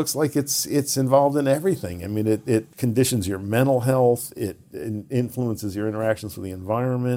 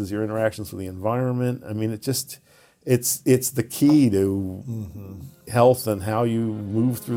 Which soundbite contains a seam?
first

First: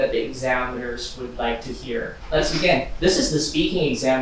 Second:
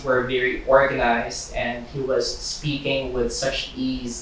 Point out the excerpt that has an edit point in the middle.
first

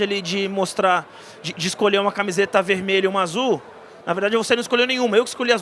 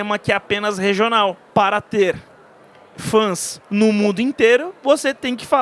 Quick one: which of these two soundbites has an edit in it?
second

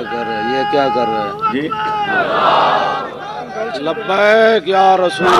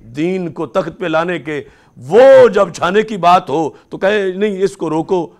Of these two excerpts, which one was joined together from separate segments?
first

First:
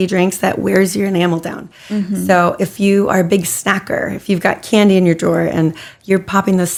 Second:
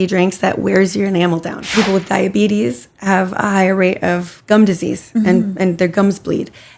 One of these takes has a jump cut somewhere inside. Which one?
second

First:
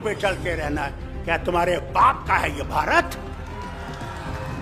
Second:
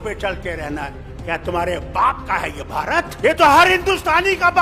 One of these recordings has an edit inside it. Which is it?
second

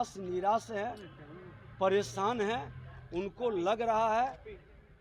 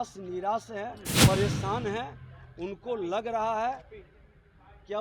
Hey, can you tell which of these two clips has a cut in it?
second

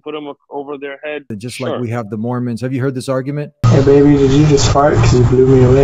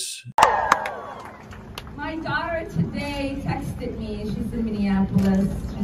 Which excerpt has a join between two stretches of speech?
first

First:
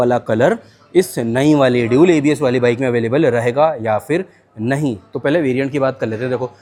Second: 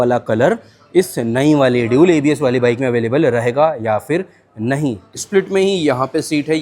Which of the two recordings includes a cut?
second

